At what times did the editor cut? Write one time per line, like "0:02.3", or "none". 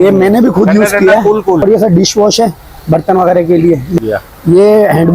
0:01.6
0:04.0